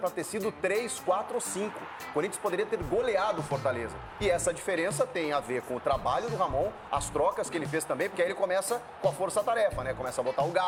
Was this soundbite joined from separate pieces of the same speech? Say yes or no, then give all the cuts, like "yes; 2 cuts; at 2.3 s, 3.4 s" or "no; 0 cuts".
no; 0 cuts